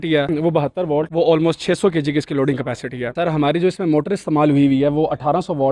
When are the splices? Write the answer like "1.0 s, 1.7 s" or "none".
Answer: 3.1 s